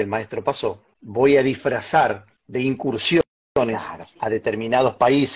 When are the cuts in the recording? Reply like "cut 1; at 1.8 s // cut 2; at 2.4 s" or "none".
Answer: cut 1; at 0.9 s // cut 2; at 2.3 s